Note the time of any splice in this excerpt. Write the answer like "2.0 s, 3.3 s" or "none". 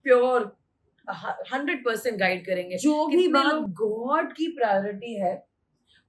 2.7 s

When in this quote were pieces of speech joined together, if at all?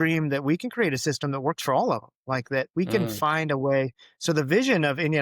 none

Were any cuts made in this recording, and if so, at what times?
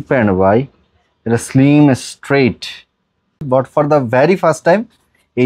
3.4 s

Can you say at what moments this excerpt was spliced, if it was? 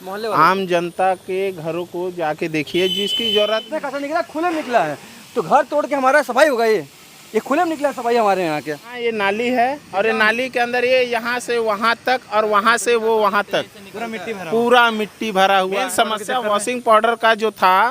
3.6 s, 8.9 s, 15.9 s

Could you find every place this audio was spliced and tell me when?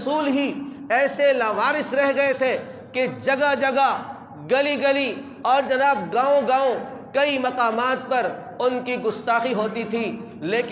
none

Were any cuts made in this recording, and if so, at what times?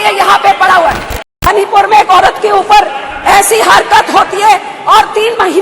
1.4 s

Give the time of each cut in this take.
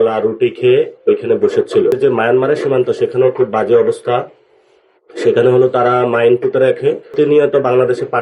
2.0 s, 7.2 s

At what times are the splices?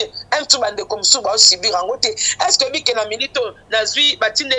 none

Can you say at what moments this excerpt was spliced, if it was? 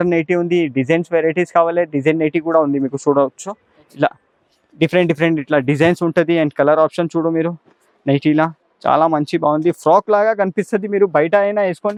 none

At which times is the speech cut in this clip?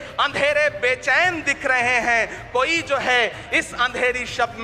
none

